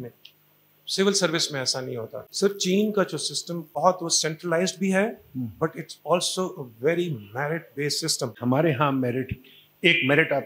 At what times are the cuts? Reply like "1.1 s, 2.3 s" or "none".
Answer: 2.2 s, 3.8 s, 8.3 s

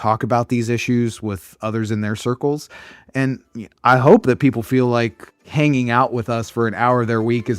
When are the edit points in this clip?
5.5 s

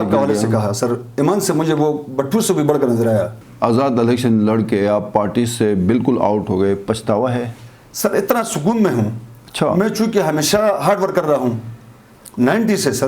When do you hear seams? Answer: 3.4 s

